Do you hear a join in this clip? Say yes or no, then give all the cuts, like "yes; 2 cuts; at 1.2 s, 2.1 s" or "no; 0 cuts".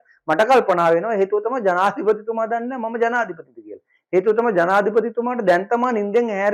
no; 0 cuts